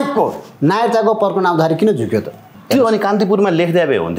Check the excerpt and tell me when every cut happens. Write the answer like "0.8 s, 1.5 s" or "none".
2.5 s